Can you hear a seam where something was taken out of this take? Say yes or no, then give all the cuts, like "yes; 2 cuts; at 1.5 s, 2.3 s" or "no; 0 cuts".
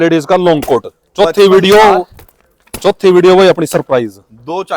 no; 0 cuts